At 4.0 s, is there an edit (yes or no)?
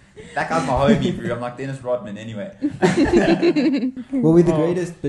yes